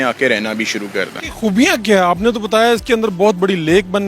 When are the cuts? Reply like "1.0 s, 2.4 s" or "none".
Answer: 1.2 s